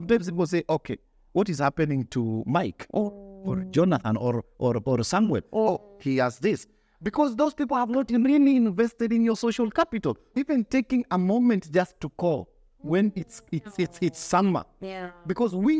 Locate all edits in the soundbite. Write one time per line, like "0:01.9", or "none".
0:10.3